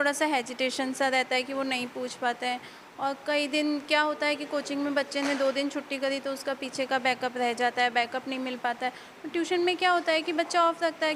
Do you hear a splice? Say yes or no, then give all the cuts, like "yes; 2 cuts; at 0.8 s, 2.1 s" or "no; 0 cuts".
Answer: no; 0 cuts